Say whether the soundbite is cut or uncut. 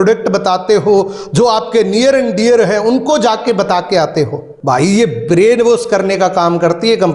cut